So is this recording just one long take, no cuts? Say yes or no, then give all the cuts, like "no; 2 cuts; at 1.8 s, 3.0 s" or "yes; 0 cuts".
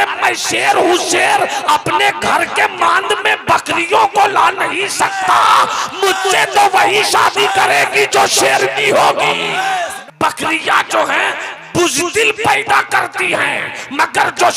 no; 1 cut; at 10.0 s